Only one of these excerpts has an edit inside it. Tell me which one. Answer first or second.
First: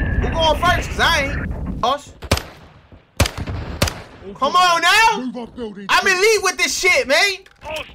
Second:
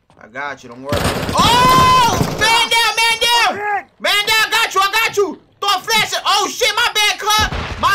first